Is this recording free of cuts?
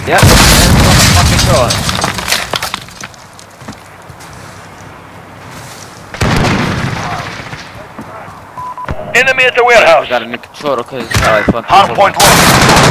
yes; 0 cuts

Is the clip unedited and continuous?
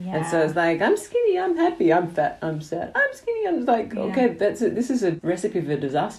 no; 1 cut; at 5.2 s

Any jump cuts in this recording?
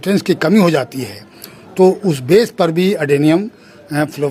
no; 0 cuts

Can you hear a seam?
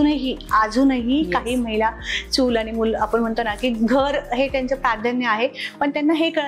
no; 0 cuts

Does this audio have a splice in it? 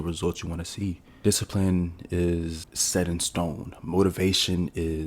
yes; 2 cuts; at 1.1 s, 2.7 s

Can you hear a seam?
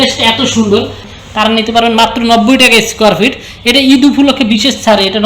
yes; 1 cut; at 1.1 s

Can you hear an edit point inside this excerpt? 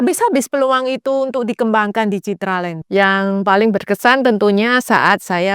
yes; 1 cut; at 2.8 s

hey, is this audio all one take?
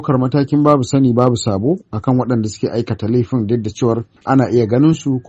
no; 1 cut; at 4.1 s

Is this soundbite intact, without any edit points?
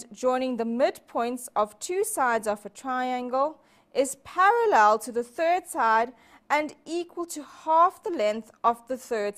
no; 1 cut; at 4.8 s

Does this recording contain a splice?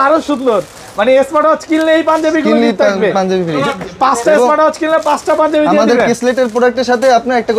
no; 0 cuts

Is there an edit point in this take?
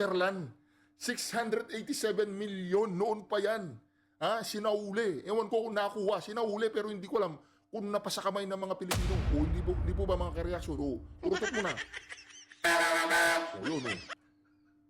no; 0 cuts

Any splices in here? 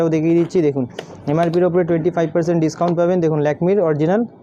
no; 0 cuts

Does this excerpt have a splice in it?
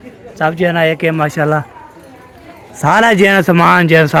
no; 0 cuts

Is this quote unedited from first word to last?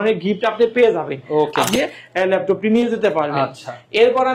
no; 1 cut; at 1.7 s

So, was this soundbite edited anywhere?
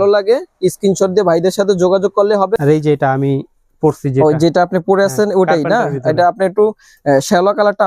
yes; 1 cut; at 2.6 s

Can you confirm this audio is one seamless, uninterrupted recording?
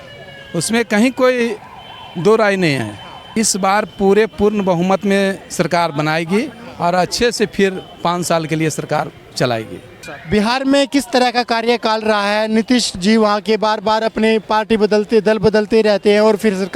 no; 2 cuts; at 3.2 s, 10.1 s

